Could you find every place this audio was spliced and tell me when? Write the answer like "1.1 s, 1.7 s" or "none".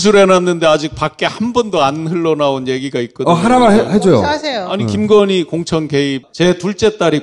6.2 s